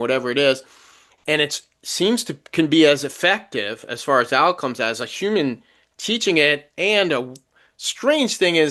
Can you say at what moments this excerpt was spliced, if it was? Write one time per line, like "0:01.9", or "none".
none